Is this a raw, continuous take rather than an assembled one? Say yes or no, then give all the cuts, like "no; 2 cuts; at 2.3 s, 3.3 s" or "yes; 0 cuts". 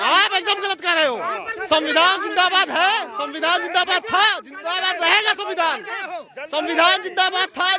yes; 0 cuts